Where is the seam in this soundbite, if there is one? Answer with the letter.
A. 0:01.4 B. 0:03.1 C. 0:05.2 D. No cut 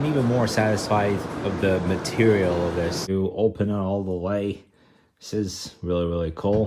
B